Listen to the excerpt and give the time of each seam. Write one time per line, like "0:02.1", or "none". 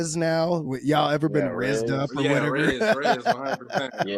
none

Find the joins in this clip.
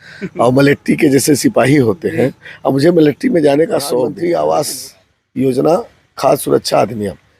0:04.1

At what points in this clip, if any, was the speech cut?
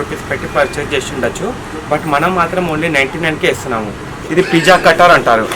0:04.1

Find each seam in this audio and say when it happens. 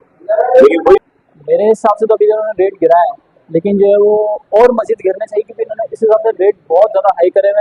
0:01.0

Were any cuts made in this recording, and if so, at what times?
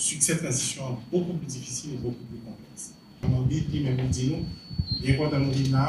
0:03.5

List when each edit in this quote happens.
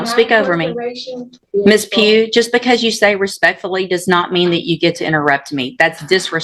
0:01.4

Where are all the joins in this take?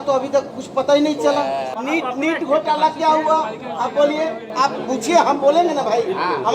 0:01.7
0:04.4

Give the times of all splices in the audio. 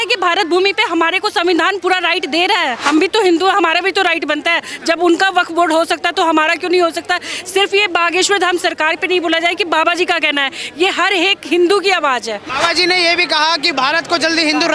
0:02.8
0:12.4

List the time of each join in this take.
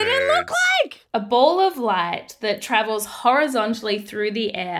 0:01.0

